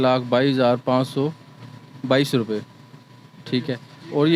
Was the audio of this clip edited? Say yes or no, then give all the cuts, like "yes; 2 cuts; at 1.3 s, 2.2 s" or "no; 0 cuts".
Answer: no; 0 cuts